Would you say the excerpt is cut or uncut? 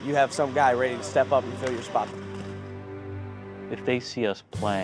cut